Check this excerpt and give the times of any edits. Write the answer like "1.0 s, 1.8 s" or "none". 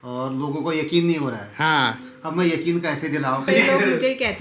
3.5 s